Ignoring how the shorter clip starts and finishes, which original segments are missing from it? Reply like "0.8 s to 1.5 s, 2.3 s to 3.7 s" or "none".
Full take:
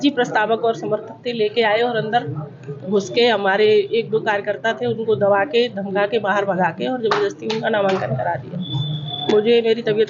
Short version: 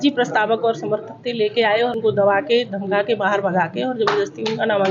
1.9 s to 5.0 s